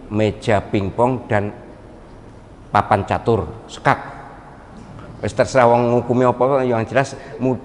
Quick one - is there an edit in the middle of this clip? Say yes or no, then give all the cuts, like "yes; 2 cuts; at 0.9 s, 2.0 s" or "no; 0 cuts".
no; 0 cuts